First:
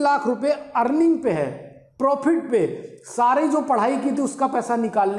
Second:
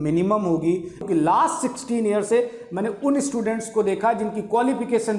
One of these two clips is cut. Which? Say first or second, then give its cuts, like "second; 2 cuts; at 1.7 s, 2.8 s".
second; 1 cut; at 1.0 s